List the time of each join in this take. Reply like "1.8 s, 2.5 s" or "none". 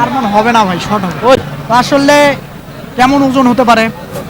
1.4 s